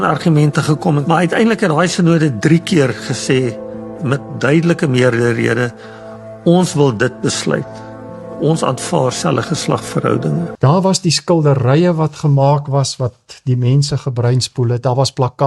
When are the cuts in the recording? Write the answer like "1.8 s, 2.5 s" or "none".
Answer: 10.5 s